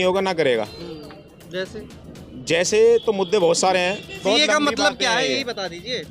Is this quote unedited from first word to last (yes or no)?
no